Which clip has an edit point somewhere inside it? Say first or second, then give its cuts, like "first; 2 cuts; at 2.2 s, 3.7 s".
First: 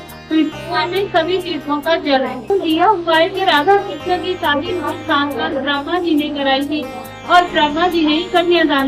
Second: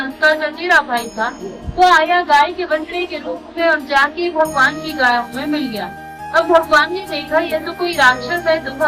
first; 1 cut; at 2.5 s